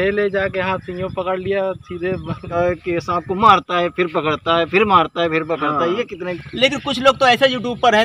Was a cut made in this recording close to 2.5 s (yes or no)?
yes